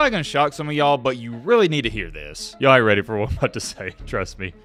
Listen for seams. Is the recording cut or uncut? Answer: uncut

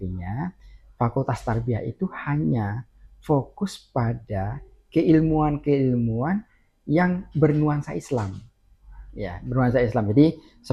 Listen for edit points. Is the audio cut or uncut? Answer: uncut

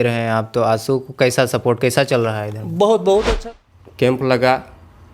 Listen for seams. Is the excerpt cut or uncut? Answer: cut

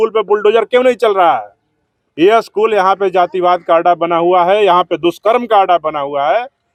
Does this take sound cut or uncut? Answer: uncut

